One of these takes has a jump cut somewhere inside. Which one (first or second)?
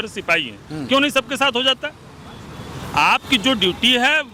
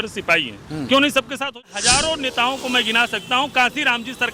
second